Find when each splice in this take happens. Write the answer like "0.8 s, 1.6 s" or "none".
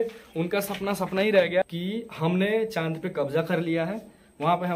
1.7 s